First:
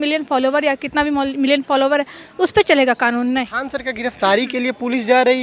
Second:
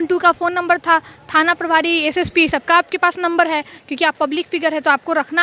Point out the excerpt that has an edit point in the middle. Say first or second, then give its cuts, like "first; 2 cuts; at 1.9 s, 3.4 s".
first; 1 cut; at 3.6 s